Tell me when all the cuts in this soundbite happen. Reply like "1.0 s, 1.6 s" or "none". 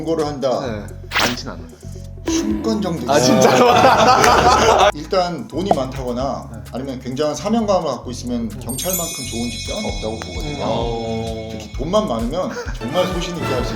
4.9 s